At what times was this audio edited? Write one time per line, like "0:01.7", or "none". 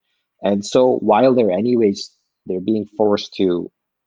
none